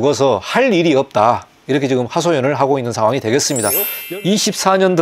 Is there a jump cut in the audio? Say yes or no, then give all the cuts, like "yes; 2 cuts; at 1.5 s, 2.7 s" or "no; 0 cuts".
yes; 1 cut; at 3.9 s